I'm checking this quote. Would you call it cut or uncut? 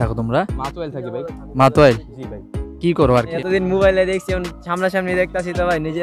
cut